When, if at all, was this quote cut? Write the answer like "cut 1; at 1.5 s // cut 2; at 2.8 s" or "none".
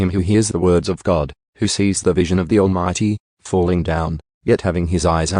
cut 1; at 1.4 s